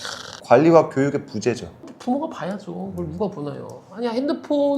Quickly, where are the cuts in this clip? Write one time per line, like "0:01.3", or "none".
0:01.8